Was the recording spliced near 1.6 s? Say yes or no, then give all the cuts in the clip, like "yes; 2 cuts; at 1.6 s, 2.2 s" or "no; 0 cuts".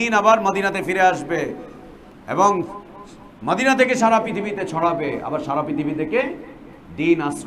no; 0 cuts